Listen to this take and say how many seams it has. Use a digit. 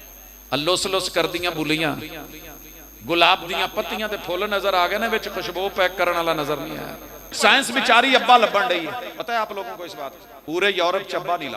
3